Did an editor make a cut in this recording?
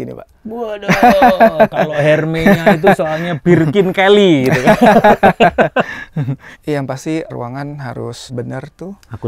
yes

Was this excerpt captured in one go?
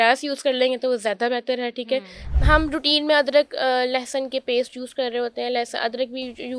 no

